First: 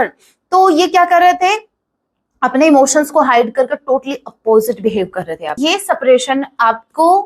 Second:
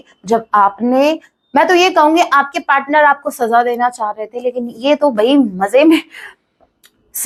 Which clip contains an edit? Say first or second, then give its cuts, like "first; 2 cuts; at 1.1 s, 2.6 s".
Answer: first; 1 cut; at 5.6 s